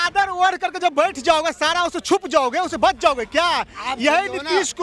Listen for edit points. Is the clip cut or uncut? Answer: uncut